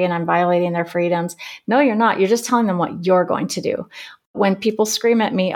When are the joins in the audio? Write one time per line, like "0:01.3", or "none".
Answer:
none